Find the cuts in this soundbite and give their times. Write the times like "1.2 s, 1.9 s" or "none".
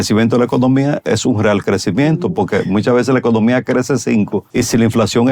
4.4 s

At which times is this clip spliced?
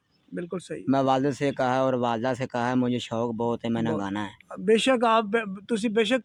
none

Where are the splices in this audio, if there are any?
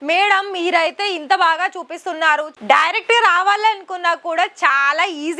2.6 s

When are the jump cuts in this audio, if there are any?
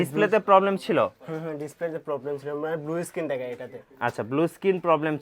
none

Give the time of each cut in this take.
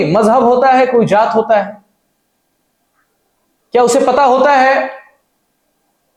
none

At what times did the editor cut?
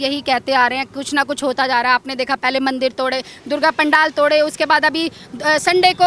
none

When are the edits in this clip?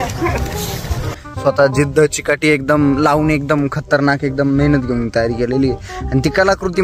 1.1 s

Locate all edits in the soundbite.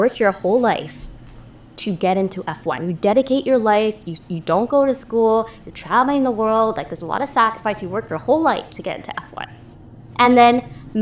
none

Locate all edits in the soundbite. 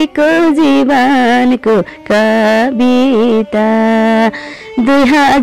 none

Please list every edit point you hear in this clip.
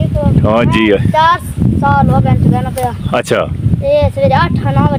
none

